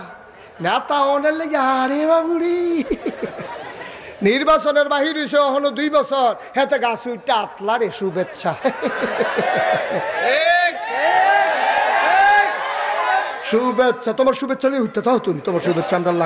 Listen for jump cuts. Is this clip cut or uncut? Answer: uncut